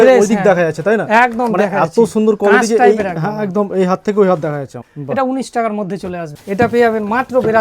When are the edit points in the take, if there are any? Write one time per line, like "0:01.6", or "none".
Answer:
0:04.9
0:06.4